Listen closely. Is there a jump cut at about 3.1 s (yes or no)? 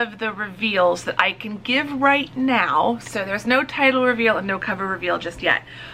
no